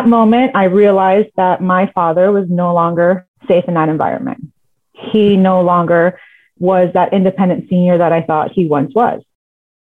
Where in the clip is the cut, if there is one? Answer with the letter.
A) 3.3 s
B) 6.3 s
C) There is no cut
A